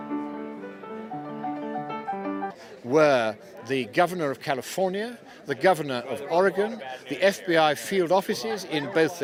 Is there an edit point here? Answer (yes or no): no